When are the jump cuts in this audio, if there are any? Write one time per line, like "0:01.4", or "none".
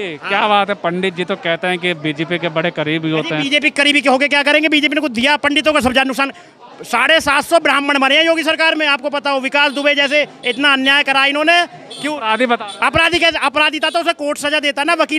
none